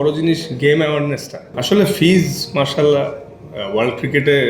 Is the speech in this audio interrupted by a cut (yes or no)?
yes